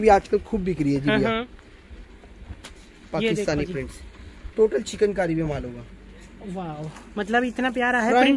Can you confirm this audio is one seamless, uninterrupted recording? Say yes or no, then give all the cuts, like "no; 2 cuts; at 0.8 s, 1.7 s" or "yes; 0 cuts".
yes; 0 cuts